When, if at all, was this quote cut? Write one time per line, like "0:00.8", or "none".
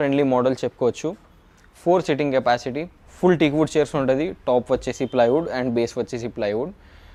none